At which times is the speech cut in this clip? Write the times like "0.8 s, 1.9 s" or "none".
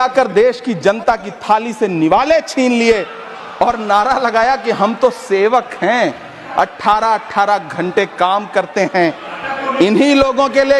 none